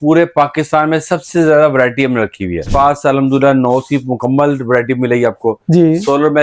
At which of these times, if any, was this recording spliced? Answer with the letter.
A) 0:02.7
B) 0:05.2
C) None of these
A